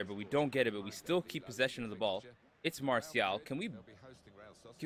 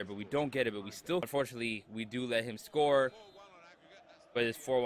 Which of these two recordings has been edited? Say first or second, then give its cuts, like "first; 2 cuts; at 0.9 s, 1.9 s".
second; 1 cut; at 1.3 s